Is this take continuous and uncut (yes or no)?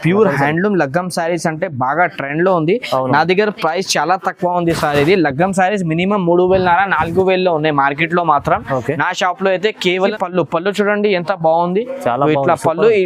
no